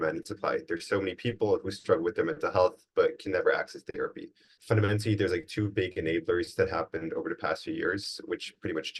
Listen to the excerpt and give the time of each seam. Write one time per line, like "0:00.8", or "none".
0:04.5